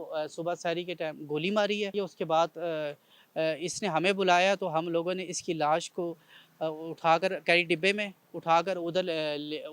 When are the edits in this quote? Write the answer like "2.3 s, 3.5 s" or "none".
1.9 s